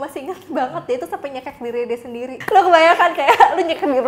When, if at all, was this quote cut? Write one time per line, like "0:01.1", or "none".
0:02.3

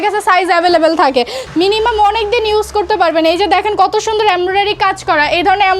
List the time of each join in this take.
0:01.4

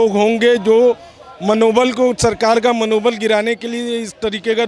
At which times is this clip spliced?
none

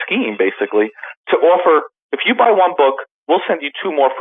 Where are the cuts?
none

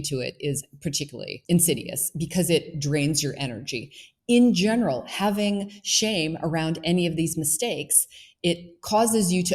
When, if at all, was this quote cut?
0:01.4

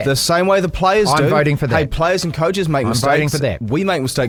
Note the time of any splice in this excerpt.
none

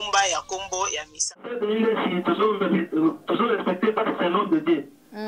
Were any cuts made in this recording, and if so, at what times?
0:01.5

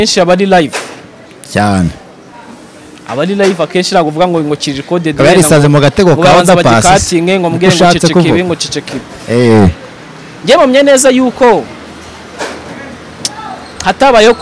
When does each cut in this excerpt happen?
none

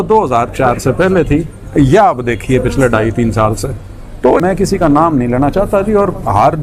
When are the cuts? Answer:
0:04.4

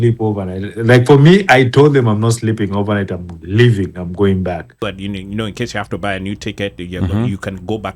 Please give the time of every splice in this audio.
0:04.8

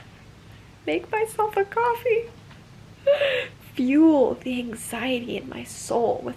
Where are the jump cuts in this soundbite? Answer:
none

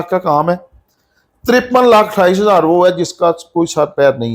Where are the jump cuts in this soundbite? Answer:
none

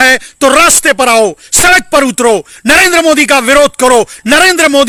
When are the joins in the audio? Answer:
none

